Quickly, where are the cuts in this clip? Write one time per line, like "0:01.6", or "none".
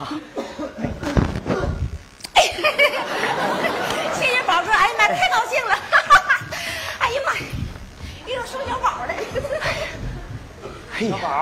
none